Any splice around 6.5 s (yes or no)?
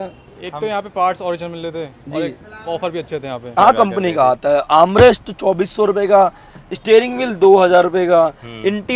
no